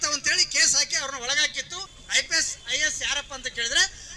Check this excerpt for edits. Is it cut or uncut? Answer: cut